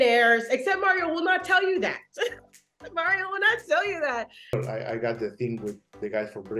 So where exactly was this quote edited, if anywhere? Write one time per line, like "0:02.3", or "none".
0:04.5